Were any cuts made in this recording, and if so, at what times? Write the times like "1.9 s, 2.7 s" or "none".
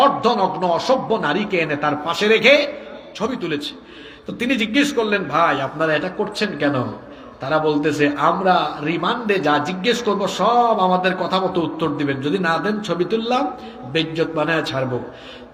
none